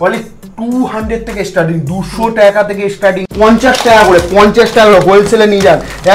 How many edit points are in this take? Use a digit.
1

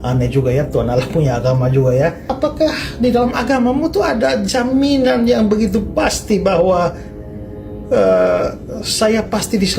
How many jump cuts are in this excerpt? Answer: 1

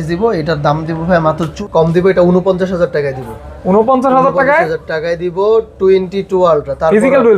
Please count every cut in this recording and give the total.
1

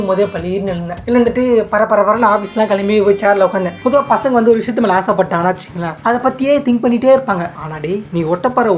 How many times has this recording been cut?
3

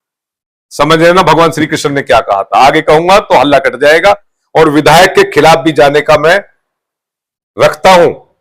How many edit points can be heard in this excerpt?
1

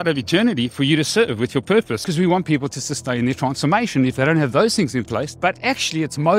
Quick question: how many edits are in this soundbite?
2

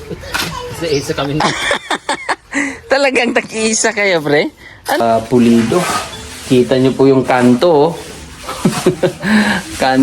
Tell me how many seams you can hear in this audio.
1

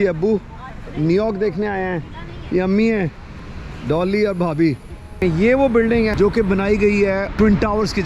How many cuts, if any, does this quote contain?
3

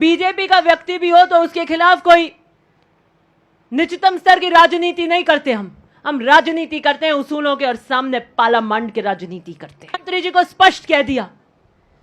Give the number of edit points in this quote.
1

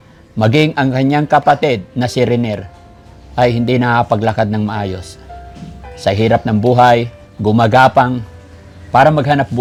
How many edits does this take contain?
0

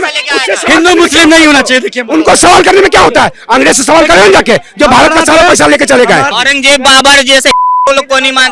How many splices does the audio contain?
1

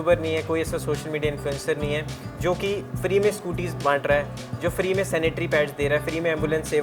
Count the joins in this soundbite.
0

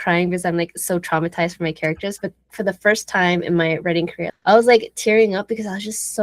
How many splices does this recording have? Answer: 2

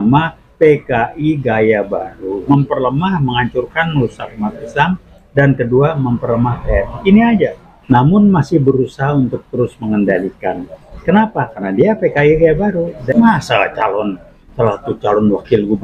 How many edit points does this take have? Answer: 3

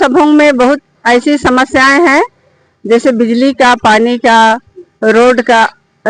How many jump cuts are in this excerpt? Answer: 1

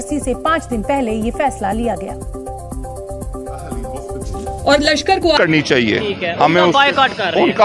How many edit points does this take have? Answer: 1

